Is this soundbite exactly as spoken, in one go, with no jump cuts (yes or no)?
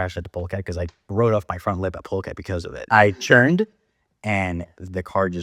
yes